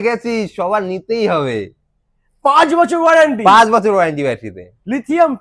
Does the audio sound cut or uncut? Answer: uncut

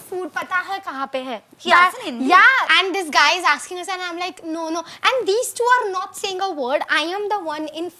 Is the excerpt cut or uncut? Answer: cut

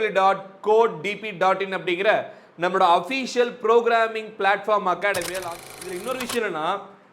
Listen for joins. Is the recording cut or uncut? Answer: cut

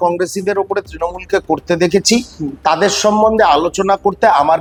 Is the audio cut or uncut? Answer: uncut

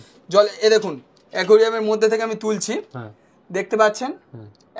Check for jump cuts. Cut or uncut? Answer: uncut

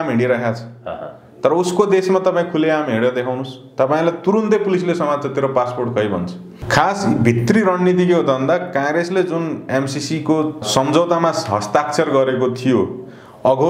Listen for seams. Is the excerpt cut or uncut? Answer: cut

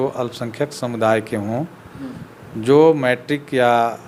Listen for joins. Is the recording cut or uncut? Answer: uncut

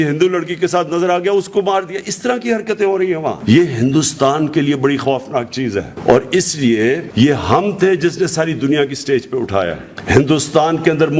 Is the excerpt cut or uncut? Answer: uncut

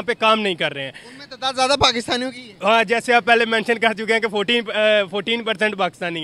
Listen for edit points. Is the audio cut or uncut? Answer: uncut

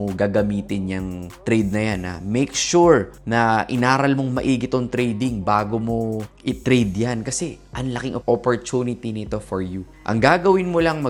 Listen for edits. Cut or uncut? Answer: uncut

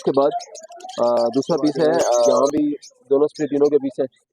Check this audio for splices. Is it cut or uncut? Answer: cut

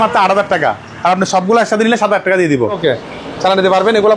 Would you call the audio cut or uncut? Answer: cut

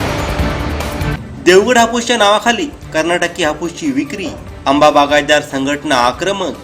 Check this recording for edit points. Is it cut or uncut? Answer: cut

